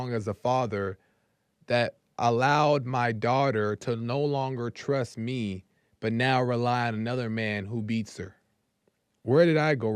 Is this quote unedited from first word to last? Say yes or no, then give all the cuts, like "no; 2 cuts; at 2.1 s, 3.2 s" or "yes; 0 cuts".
yes; 0 cuts